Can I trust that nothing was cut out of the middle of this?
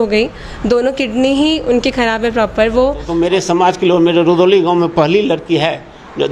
no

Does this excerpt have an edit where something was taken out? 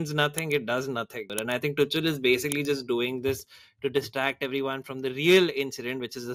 yes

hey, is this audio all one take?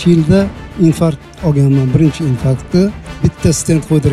no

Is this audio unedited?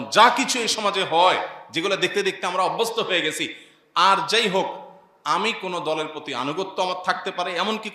yes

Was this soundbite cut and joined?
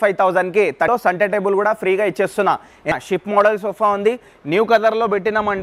yes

